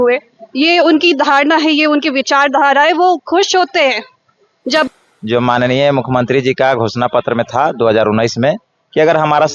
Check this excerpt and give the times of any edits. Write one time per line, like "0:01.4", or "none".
0:04.9